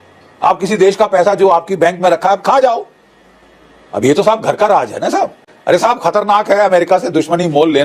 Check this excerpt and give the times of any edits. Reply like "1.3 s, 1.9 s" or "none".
5.5 s

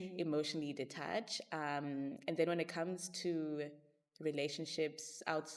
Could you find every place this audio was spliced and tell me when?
none

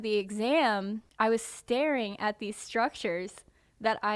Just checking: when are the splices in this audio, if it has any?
1.0 s

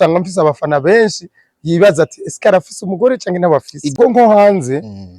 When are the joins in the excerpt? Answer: 3.8 s

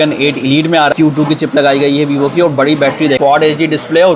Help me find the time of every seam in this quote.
0.9 s, 3.2 s

